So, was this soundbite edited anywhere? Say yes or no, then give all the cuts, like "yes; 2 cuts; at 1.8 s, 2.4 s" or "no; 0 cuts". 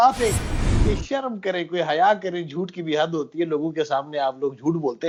no; 0 cuts